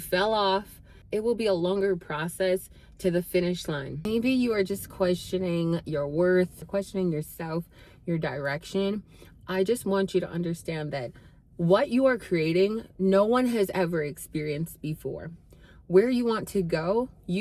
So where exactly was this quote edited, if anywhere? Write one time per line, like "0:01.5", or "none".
0:04.1
0:06.7